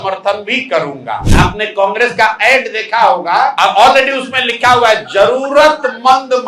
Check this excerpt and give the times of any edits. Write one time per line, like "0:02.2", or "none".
0:01.3
0:03.5